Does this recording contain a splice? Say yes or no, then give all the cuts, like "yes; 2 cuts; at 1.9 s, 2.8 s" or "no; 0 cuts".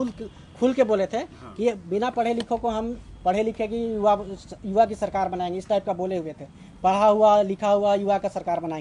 no; 0 cuts